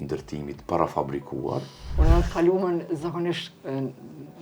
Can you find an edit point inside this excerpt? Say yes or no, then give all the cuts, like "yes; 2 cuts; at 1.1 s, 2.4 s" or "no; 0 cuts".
yes; 1 cut; at 1.8 s